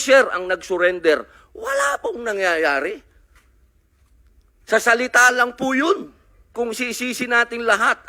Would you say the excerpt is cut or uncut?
cut